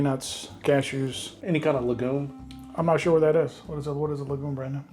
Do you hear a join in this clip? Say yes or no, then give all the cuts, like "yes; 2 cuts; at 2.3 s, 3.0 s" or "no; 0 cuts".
yes; 2 cuts; at 1.4 s, 2.4 s